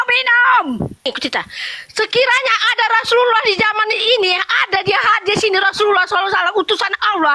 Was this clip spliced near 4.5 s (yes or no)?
no